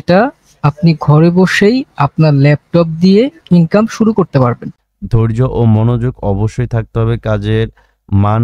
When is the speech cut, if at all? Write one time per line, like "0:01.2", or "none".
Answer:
0:04.7